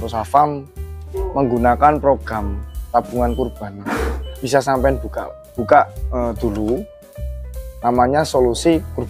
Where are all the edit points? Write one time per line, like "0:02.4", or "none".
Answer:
0:04.4

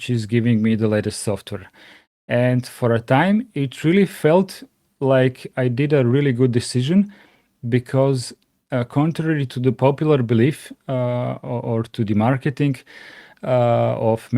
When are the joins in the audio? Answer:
none

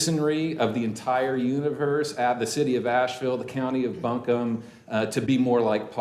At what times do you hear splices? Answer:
none

